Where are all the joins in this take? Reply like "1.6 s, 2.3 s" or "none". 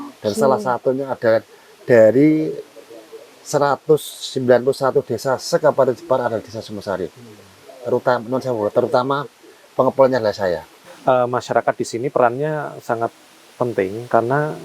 10.8 s